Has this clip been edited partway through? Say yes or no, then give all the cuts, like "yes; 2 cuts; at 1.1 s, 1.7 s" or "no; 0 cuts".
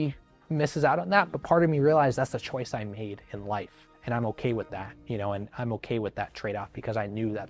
no; 0 cuts